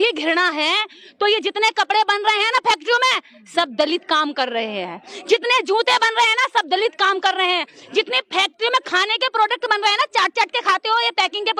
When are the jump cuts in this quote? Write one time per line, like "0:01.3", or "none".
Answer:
none